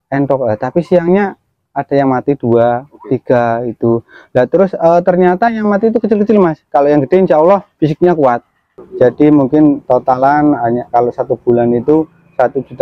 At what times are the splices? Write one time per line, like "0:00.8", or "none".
0:08.8